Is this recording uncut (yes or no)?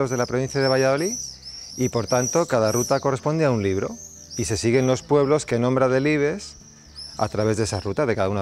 yes